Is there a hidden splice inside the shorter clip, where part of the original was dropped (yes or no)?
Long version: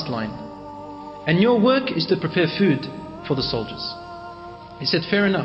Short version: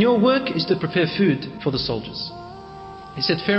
yes